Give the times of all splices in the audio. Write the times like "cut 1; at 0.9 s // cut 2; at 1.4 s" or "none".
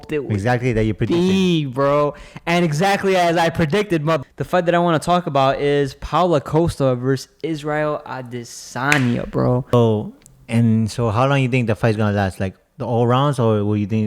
cut 1; at 4.2 s // cut 2; at 9.7 s